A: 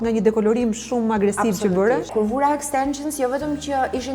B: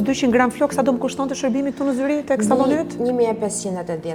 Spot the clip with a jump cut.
A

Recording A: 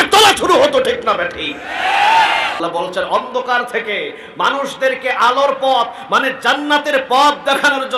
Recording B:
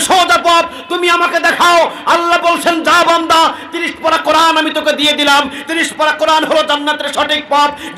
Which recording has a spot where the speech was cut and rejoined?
A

